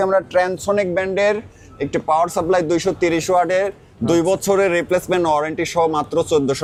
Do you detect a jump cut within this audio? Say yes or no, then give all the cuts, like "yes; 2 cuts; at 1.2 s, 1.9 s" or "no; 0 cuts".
no; 0 cuts